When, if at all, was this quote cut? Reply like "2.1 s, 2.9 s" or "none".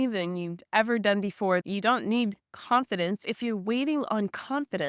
1.6 s, 3.2 s